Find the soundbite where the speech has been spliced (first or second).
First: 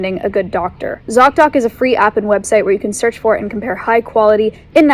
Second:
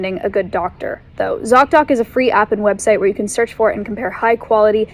first